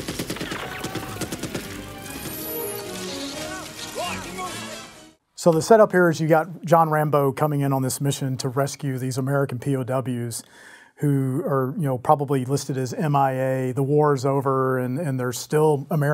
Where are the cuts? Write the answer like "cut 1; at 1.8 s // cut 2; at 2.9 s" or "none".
none